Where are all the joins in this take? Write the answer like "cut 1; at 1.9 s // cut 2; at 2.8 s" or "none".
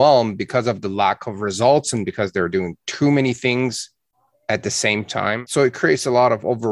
cut 1; at 5.4 s